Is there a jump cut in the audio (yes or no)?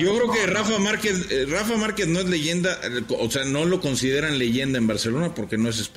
no